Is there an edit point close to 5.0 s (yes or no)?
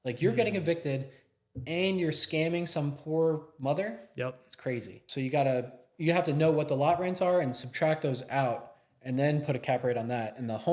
yes